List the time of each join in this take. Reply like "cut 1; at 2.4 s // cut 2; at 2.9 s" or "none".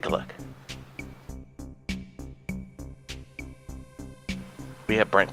none